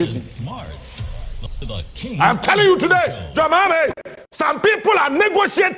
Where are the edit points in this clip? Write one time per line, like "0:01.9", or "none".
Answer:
0:04.6